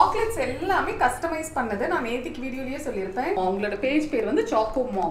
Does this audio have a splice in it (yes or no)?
yes